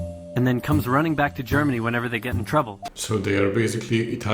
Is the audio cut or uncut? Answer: cut